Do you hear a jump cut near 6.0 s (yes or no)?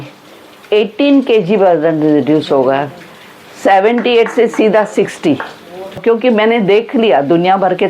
yes